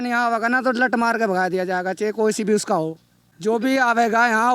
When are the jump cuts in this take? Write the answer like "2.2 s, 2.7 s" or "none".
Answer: none